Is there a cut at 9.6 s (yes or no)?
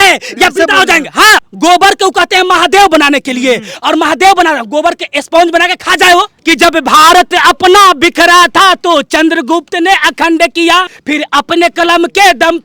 no